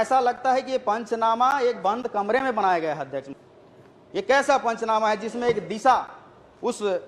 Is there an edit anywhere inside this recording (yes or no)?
yes